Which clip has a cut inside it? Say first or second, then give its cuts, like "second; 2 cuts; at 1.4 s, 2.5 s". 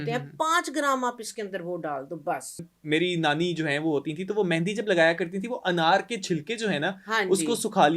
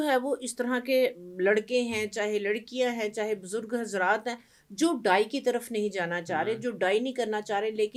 first; 1 cut; at 2.7 s